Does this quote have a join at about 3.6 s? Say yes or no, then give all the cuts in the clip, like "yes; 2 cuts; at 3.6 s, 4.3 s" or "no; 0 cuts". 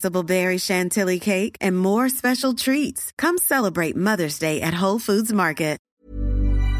no; 1 cut; at 5.9 s